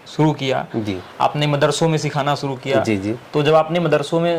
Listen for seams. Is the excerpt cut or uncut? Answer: uncut